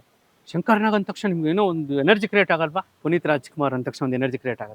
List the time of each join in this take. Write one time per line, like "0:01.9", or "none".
0:02.9